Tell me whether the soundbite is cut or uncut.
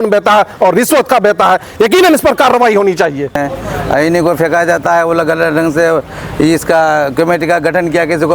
uncut